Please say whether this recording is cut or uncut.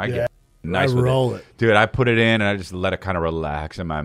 uncut